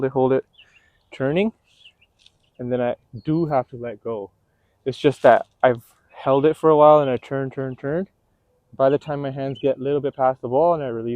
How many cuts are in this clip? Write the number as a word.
zero